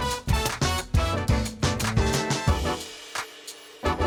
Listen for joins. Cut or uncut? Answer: uncut